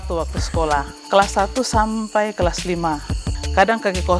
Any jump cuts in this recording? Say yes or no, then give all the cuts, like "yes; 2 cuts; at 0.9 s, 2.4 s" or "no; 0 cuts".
yes; 2 cuts; at 1.0 s, 3.2 s